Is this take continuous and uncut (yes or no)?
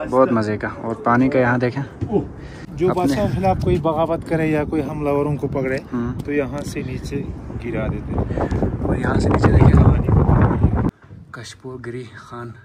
no